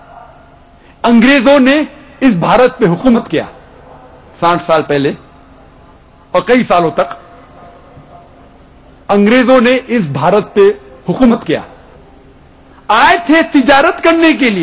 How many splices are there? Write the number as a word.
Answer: one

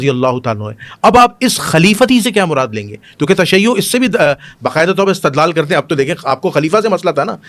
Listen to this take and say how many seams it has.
zero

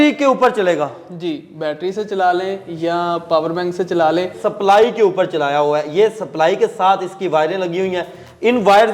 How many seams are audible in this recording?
one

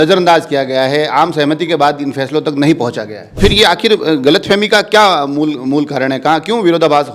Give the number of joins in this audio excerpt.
one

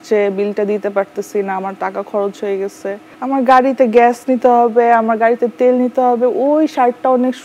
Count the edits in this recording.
zero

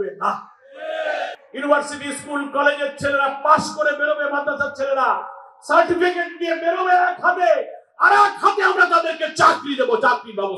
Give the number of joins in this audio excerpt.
one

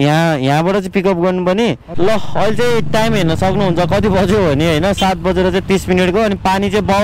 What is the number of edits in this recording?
one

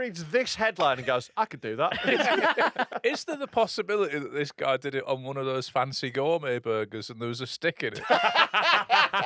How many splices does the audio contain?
two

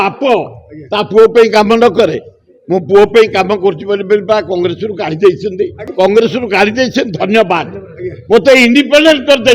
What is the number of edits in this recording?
one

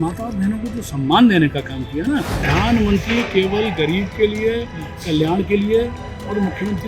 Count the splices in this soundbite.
one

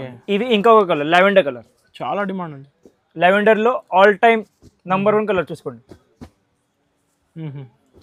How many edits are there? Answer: zero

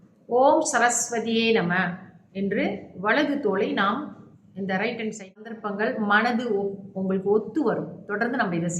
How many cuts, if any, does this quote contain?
one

